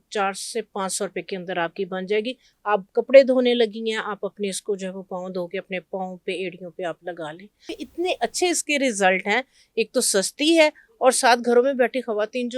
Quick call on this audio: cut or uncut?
cut